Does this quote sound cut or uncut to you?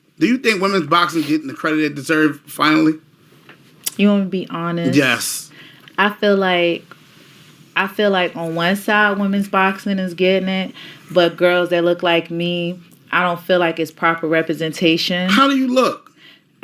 cut